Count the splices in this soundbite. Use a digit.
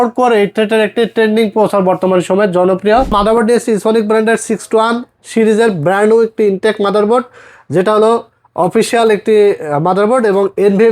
1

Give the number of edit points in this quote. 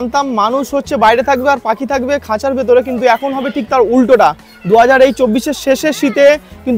0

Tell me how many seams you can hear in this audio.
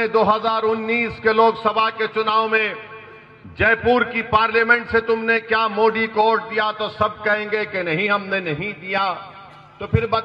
0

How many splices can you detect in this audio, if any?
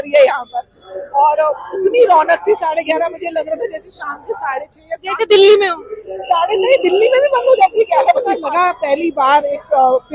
1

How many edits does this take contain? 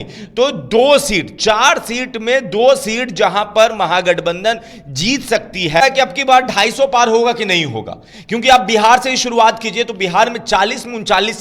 1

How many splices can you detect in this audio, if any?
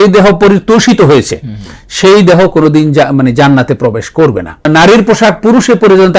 1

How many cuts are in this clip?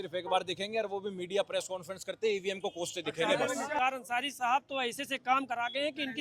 1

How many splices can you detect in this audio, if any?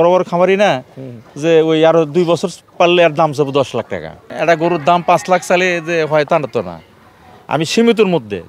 1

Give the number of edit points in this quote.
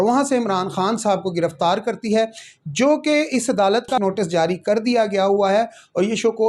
1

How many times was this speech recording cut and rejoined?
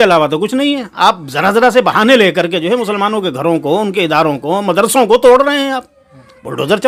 0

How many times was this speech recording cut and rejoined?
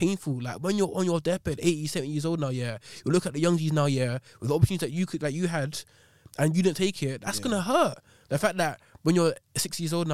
0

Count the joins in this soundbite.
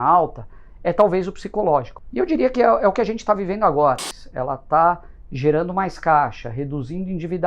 2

